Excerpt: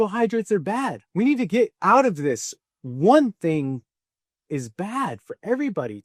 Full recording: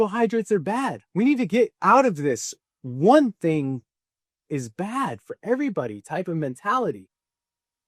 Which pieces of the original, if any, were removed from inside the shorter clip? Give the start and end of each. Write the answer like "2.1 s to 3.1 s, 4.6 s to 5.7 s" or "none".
none